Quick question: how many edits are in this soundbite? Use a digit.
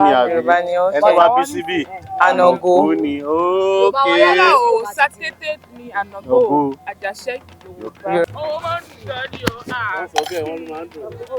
1